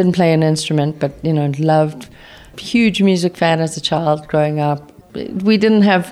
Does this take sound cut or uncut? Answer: cut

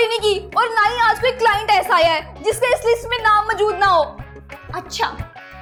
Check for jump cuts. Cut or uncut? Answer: uncut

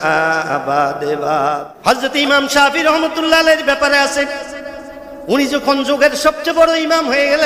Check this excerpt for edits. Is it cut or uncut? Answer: cut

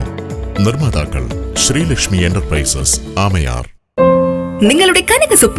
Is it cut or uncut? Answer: cut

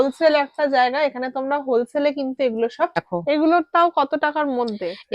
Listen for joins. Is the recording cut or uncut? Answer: cut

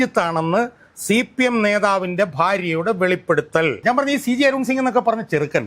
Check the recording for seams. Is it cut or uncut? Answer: cut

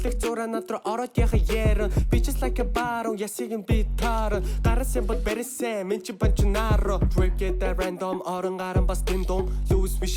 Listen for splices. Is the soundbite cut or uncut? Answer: cut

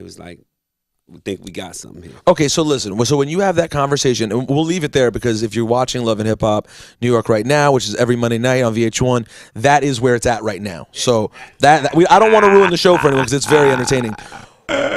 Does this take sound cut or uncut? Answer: cut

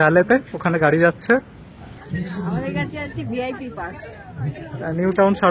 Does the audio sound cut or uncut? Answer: cut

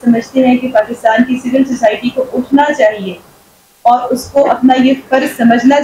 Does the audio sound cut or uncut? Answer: uncut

